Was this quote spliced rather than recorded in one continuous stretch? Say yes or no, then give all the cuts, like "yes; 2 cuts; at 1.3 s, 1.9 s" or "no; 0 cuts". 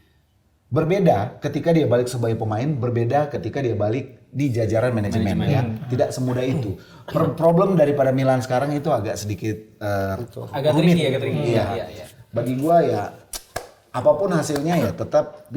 no; 0 cuts